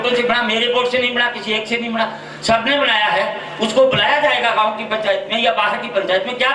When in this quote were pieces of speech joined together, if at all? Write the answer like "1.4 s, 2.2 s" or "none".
none